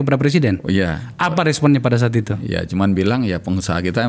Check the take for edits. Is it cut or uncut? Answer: uncut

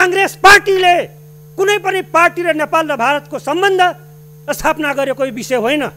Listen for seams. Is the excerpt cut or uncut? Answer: uncut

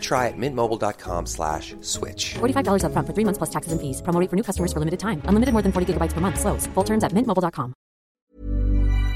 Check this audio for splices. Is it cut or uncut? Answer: cut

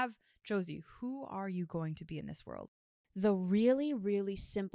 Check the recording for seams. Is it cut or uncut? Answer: cut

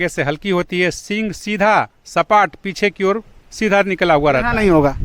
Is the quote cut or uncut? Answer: uncut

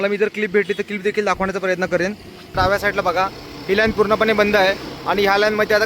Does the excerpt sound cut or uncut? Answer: cut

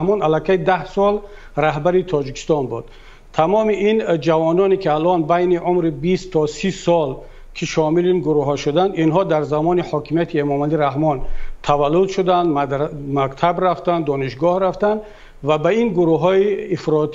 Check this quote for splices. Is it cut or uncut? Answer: uncut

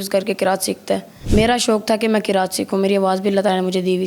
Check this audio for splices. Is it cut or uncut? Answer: cut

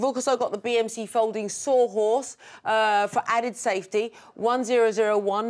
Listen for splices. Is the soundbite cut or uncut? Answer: uncut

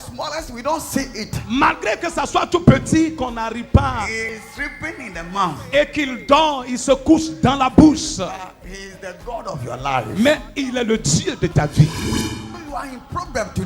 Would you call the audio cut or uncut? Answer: cut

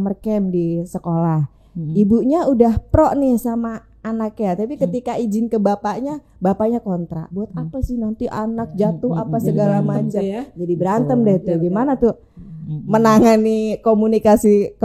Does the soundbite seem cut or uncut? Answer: uncut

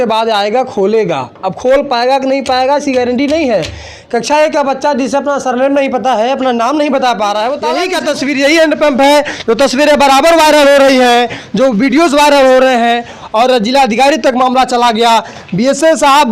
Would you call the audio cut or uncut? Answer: cut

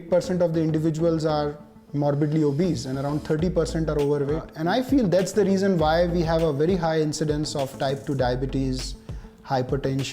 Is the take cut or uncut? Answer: cut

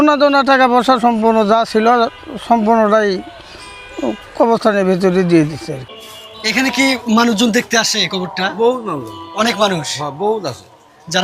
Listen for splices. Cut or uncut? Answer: uncut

